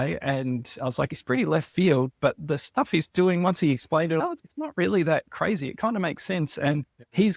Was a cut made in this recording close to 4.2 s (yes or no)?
yes